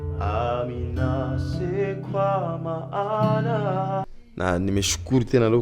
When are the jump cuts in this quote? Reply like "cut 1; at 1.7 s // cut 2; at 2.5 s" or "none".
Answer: cut 1; at 4.1 s